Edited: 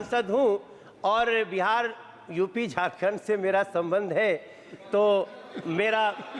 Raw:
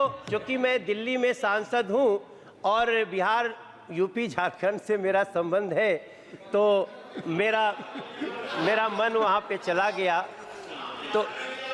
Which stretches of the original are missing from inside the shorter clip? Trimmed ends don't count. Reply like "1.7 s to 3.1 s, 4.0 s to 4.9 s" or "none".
none